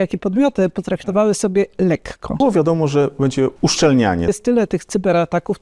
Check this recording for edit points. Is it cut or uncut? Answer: cut